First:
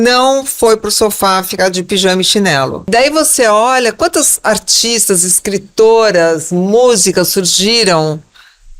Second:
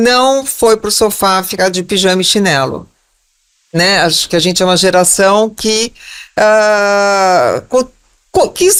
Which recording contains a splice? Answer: first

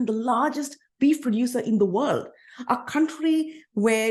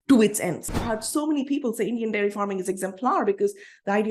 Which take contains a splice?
second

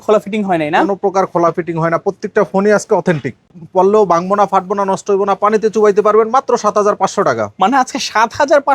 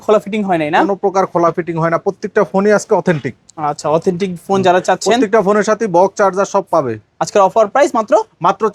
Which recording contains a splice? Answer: first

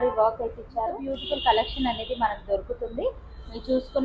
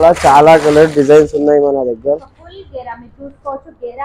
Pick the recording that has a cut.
first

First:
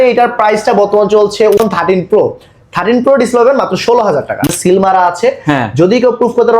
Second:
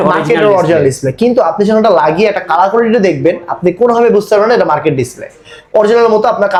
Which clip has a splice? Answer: first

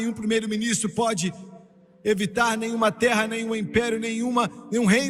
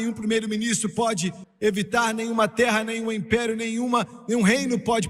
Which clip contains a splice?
second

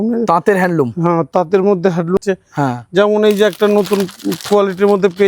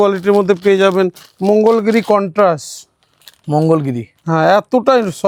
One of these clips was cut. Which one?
first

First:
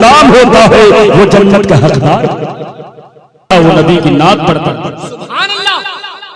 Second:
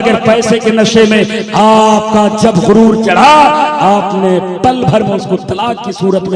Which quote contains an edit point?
first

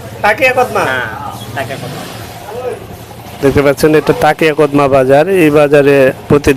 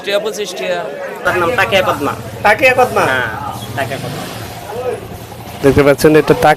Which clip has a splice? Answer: second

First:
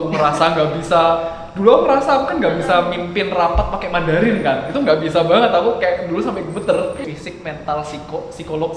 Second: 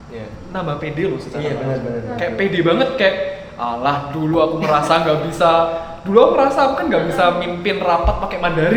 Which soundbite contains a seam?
first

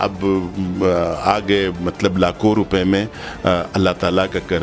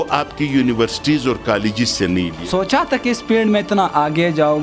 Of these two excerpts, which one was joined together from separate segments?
second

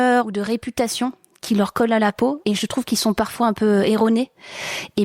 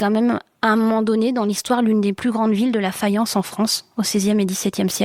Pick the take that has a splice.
first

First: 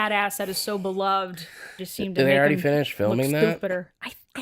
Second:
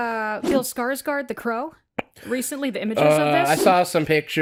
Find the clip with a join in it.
first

